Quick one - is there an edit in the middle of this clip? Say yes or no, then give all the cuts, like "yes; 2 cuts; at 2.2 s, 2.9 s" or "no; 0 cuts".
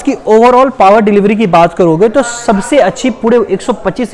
no; 0 cuts